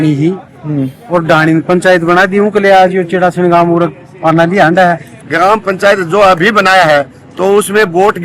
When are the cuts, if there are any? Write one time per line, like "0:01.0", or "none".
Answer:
0:05.2